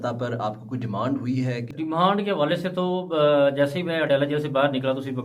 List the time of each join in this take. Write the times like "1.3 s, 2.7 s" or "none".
1.7 s